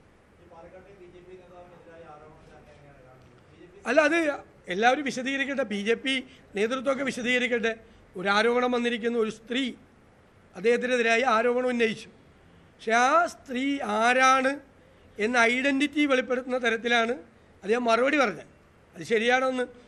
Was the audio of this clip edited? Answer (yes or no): no